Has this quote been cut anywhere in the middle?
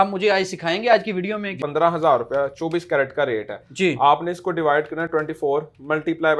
yes; 1 cut; at 1.6 s

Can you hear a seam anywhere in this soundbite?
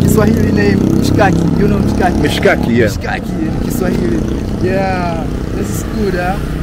no; 0 cuts

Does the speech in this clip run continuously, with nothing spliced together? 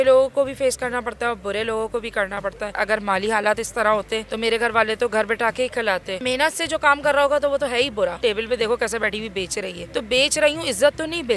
no; 3 cuts; at 2.7 s, 6.2 s, 8.2 s

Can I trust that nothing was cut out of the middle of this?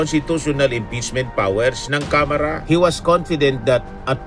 no; 1 cut; at 2.6 s

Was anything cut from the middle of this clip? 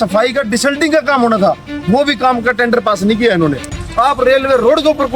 yes; 1 cut; at 3.8 s

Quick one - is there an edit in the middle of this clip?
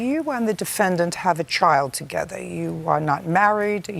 no; 0 cuts

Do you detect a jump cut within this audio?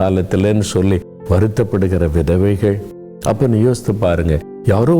yes; 1 cut; at 3.1 s

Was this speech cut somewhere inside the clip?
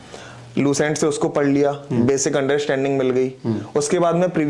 no; 0 cuts

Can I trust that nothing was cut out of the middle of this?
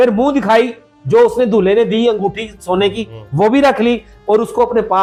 yes; 0 cuts

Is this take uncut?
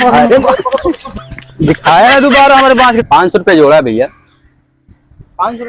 no; 1 cut; at 3.0 s

